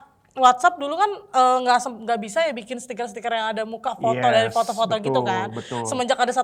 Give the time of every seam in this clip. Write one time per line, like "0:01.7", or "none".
none